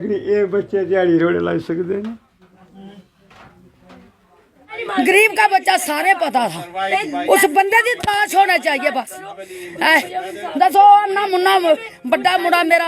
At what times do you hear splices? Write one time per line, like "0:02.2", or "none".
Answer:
0:04.8